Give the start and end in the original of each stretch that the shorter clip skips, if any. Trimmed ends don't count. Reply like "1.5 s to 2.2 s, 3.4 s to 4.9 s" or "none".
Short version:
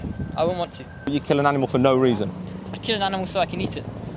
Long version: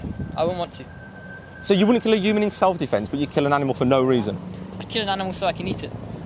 1.0 s to 3.1 s

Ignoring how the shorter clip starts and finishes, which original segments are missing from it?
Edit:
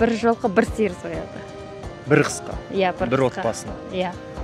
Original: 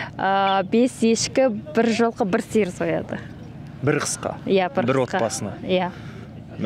none

